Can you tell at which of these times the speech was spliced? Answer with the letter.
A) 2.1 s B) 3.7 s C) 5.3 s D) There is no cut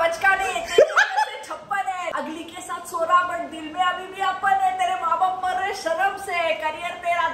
A